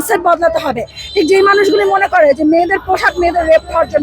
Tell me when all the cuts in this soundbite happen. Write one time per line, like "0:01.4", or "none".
none